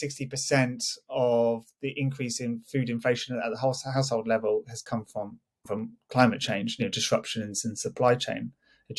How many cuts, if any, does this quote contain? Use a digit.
0